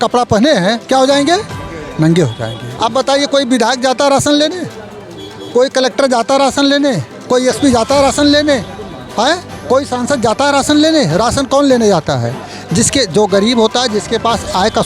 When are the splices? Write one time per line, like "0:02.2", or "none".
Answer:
0:02.7

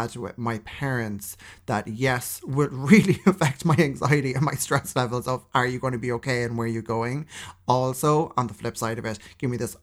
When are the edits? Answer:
none

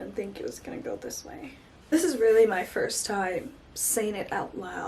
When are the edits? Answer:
0:01.9

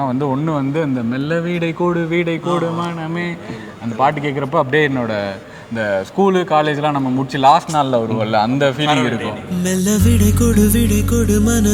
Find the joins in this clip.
none

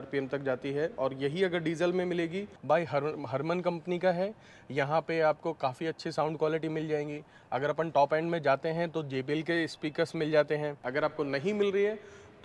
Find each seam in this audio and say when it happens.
0:02.5
0:10.8

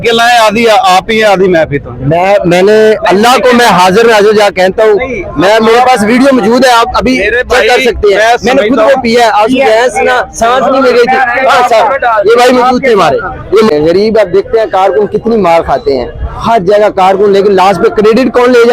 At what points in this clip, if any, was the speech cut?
0:13.9

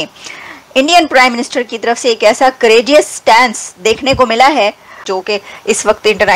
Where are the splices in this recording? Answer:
0:05.1

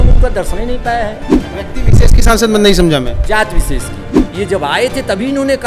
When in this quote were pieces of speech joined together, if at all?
0:01.4
0:04.2

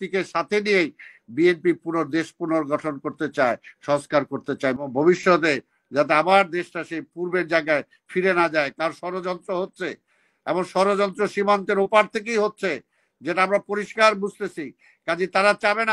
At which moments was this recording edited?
0:04.8

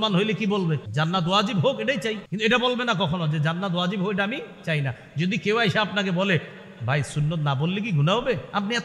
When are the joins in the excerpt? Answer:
0:00.9
0:02.3

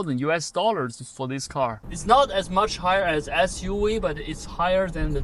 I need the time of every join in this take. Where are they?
0:01.9

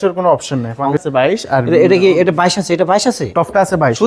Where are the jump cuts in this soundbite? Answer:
0:01.0

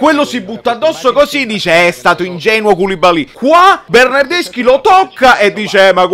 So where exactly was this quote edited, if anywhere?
0:03.6

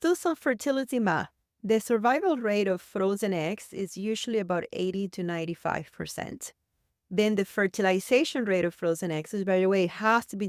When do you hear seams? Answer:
none

